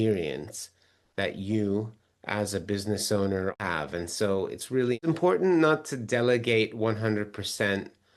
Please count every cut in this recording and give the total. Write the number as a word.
two